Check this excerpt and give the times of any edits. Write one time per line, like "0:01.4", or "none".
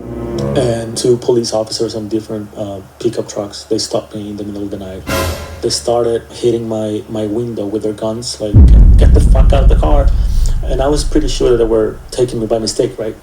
0:00.9
0:06.3